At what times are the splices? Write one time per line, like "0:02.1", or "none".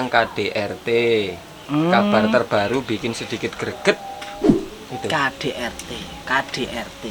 none